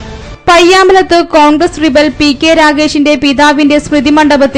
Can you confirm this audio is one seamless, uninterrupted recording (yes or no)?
yes